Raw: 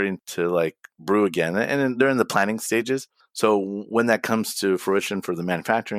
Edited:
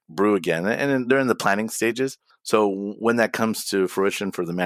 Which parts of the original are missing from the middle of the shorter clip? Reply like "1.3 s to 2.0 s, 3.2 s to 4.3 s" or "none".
none